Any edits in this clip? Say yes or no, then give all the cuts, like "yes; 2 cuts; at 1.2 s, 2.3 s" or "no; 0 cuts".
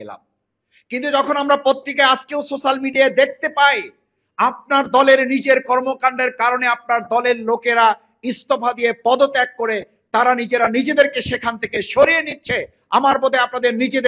no; 0 cuts